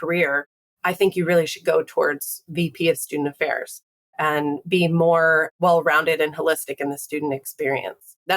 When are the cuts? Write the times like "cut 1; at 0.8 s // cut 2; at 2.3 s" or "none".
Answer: cut 1; at 5.5 s